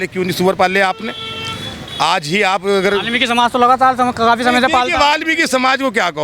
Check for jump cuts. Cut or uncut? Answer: uncut